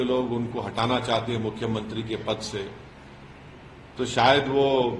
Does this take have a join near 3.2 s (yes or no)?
no